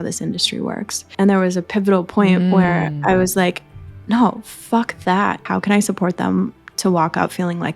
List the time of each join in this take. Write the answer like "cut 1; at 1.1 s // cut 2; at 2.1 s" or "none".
cut 1; at 1.0 s // cut 2; at 5.4 s